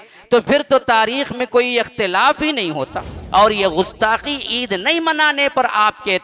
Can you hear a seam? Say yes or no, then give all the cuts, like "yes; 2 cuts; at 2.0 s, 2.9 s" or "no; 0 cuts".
yes; 1 cut; at 3.2 s